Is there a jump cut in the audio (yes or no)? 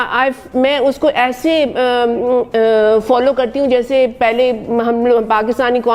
no